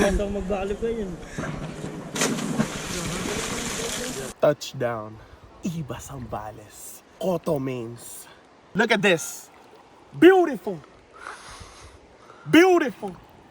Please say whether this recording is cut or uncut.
cut